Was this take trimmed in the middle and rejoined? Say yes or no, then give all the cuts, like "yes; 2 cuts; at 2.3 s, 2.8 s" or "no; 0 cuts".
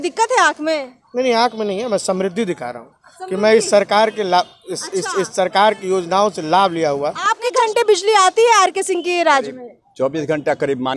yes; 1 cut; at 7.5 s